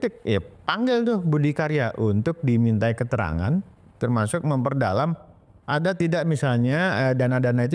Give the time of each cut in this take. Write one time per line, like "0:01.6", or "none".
none